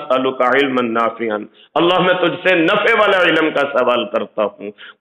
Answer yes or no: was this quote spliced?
no